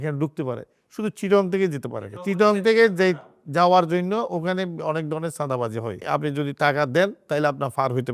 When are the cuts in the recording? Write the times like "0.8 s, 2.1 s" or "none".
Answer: 6.0 s